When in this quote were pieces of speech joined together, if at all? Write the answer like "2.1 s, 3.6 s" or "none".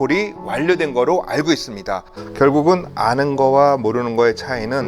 2.1 s